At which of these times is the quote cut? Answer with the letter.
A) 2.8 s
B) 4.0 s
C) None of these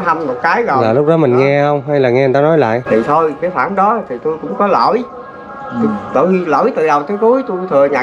A